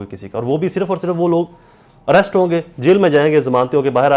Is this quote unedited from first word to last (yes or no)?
yes